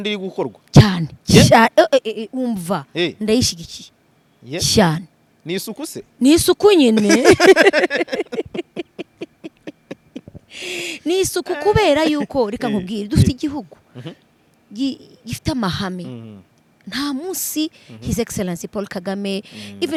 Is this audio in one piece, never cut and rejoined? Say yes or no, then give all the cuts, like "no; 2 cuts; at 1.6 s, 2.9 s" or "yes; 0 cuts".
yes; 0 cuts